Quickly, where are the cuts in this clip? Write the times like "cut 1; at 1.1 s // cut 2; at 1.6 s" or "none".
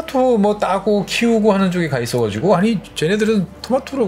cut 1; at 2.9 s